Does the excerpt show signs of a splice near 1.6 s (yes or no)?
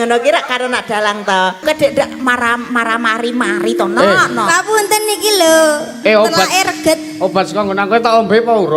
yes